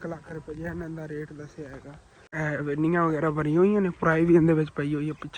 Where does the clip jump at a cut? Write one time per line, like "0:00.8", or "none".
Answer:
0:02.2